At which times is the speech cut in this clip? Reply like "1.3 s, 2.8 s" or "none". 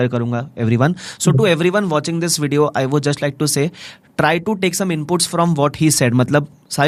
none

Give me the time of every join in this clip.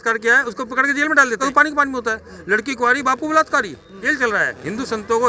1.4 s, 4.0 s

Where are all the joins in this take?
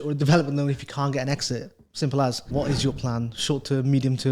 2.4 s

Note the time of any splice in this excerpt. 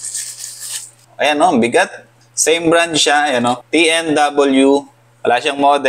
4.9 s

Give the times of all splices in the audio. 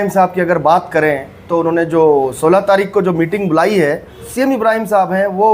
4.3 s

